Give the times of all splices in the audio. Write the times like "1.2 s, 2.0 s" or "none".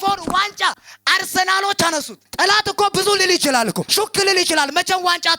2.3 s